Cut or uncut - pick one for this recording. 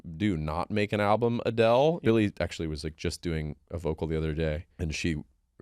cut